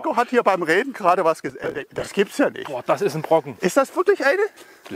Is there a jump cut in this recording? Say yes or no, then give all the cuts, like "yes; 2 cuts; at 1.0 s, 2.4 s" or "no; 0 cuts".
yes; 1 cut; at 1.8 s